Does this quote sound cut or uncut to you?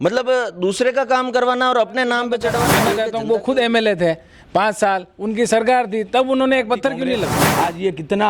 cut